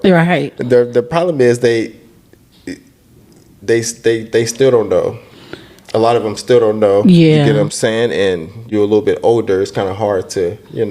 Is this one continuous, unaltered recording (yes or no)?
no